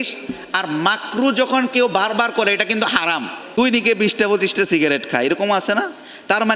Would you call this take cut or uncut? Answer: cut